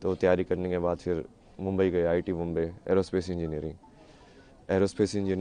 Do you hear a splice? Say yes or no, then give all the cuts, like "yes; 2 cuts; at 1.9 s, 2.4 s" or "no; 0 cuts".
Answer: no; 0 cuts